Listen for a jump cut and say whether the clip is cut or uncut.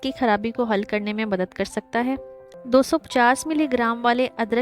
cut